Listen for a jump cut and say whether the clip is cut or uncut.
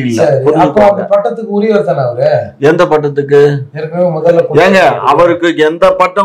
uncut